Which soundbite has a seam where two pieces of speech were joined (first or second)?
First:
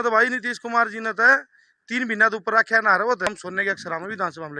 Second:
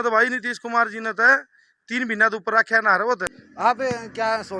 first